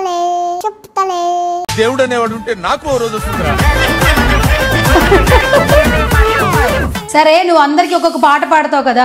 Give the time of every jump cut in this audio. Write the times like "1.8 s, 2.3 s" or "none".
6.7 s